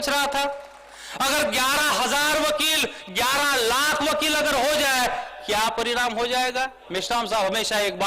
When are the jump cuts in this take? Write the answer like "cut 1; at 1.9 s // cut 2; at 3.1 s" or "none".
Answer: cut 1; at 6.8 s